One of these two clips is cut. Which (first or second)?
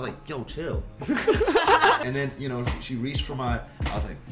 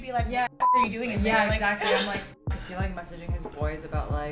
first